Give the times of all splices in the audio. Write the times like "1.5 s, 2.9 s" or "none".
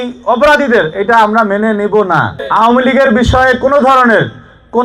2.4 s